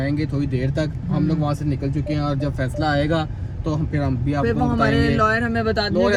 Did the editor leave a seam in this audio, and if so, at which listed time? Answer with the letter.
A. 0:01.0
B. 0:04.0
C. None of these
C